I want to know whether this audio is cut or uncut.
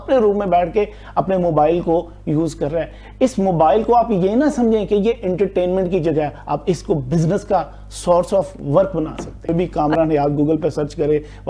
cut